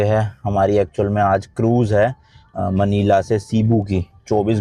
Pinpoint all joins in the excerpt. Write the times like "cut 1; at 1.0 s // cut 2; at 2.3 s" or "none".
none